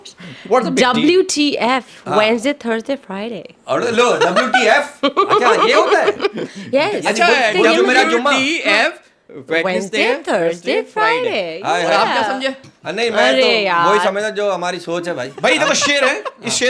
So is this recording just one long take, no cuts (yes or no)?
yes